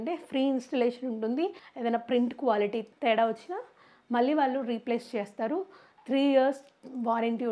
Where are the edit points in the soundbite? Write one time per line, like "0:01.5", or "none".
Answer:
0:01.7
0:02.9